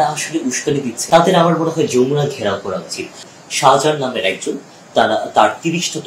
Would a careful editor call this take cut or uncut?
cut